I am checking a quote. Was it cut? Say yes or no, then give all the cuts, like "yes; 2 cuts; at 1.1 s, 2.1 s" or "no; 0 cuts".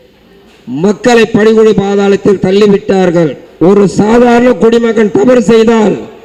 no; 0 cuts